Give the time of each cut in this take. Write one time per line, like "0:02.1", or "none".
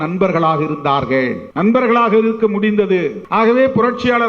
0:01.4
0:03.2